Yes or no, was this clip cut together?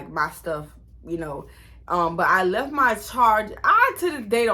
no